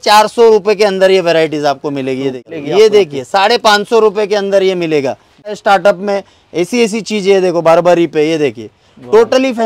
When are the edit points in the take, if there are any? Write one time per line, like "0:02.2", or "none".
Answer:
0:02.5
0:05.6